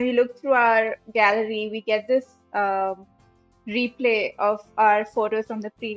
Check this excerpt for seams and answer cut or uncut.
uncut